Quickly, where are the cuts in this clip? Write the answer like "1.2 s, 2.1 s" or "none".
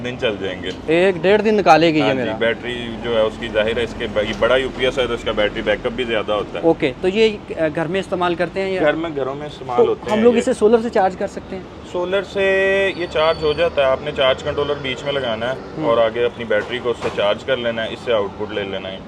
none